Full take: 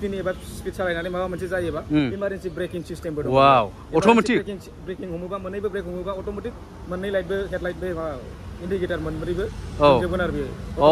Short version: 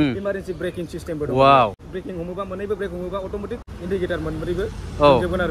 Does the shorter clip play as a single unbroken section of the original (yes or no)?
no